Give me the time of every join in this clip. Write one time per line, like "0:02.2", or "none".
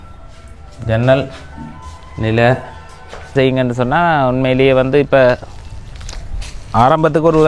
0:03.3